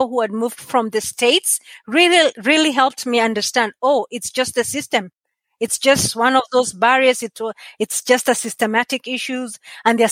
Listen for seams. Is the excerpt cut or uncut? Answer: uncut